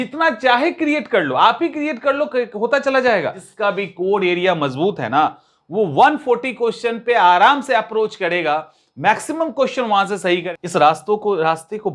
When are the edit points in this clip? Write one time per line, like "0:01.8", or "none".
0:03.4
0:10.5